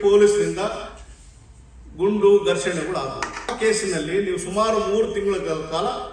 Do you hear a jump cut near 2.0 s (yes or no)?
no